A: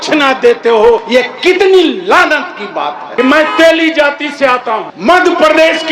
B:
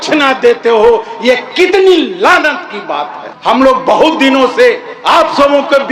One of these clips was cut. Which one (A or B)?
A